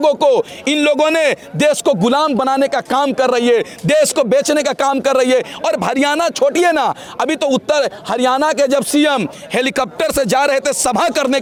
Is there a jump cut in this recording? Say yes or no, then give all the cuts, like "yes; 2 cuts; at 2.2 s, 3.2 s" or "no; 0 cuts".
no; 0 cuts